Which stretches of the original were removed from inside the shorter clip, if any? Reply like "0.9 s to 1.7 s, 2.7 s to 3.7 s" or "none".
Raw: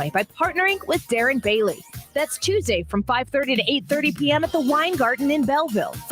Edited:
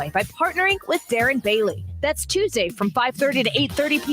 1.9 s to 2.0 s